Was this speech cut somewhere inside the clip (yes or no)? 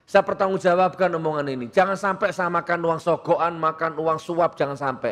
no